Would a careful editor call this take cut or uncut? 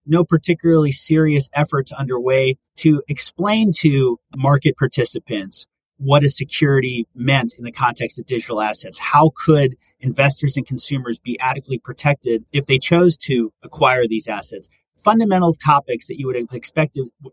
cut